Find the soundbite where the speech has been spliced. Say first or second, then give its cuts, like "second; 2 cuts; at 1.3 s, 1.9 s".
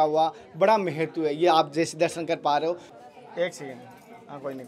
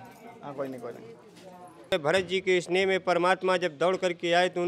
second; 1 cut; at 1.9 s